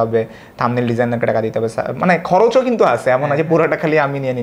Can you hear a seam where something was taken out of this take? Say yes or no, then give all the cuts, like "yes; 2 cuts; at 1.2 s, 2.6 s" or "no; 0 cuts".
no; 0 cuts